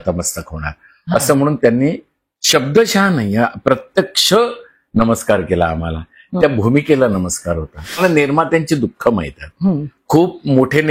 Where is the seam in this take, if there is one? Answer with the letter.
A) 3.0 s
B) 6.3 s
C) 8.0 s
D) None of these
C